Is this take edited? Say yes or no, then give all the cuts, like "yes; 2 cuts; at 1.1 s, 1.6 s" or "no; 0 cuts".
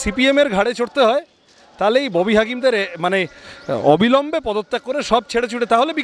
no; 0 cuts